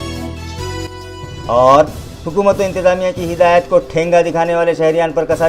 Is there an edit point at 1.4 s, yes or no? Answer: yes